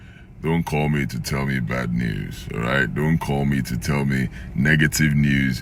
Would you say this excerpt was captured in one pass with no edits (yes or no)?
yes